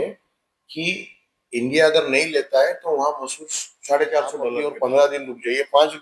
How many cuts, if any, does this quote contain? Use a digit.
1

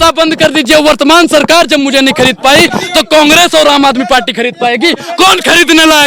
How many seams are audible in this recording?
0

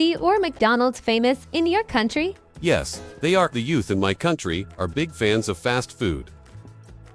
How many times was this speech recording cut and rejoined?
0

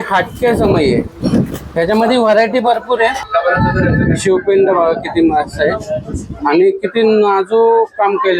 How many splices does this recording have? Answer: 1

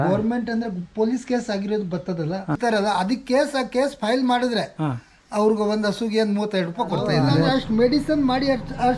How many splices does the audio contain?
2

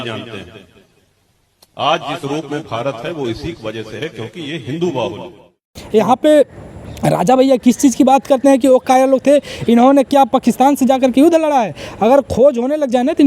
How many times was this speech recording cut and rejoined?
1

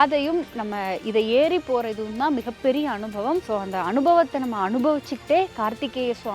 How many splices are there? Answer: 1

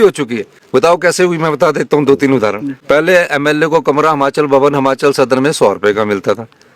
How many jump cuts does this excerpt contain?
1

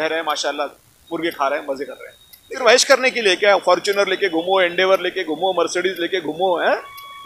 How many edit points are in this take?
1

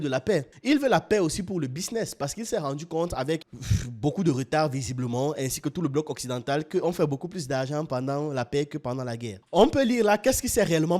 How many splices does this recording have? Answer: 1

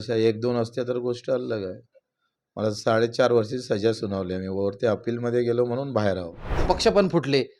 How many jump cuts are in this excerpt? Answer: 1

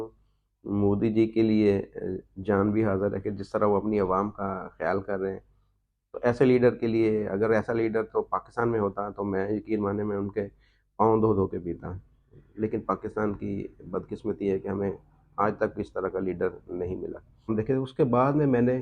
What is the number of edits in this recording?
1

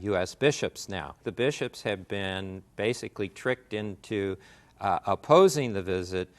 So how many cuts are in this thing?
1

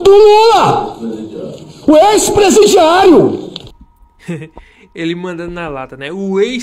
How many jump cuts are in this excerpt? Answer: 0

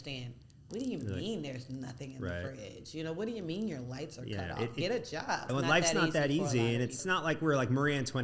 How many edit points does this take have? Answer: 2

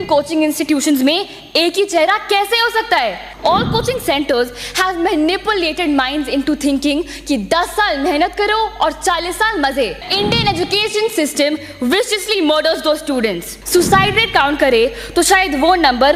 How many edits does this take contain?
3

